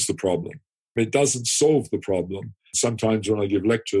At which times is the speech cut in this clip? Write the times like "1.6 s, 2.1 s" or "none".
0.9 s, 2.6 s